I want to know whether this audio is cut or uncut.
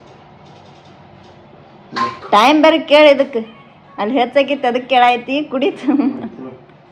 uncut